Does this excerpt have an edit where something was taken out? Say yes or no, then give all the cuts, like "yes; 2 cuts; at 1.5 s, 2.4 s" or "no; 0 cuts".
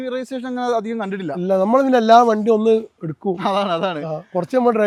no; 0 cuts